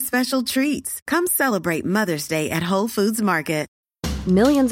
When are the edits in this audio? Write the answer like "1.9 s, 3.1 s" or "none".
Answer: 3.7 s